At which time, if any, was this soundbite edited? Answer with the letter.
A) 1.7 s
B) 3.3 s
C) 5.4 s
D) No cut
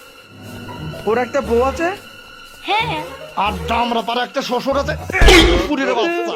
D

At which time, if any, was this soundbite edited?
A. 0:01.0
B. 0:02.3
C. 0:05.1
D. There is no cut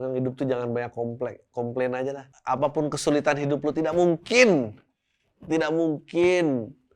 B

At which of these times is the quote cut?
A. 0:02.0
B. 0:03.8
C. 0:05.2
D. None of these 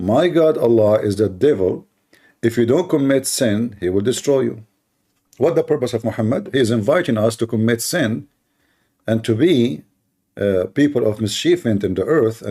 C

